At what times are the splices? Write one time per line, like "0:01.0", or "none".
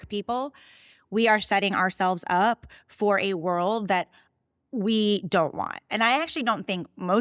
none

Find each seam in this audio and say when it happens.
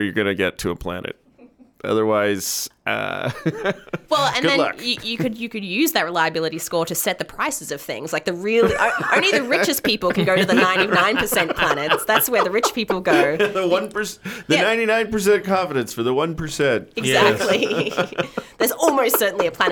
none

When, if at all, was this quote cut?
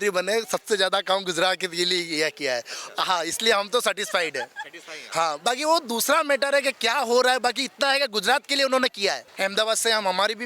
0:09.3

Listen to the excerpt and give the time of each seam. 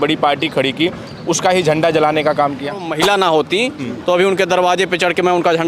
0:02.9

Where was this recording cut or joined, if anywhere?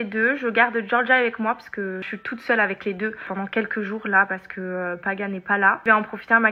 none

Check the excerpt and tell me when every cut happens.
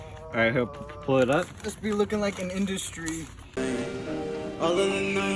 0:03.4

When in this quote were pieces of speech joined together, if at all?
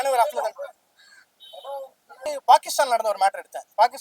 0:02.2

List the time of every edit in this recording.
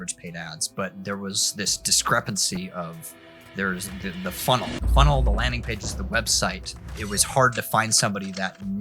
0:04.8

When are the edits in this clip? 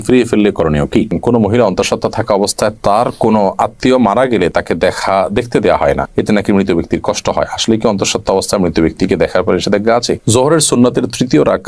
0:01.1
0:10.2

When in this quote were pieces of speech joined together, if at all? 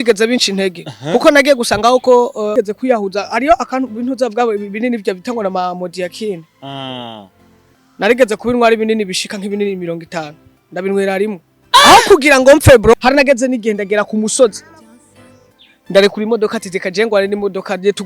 0:02.5
0:12.9

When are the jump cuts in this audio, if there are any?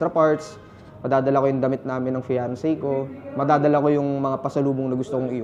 none

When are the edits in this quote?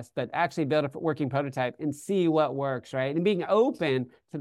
none

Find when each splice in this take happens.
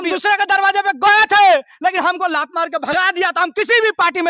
none

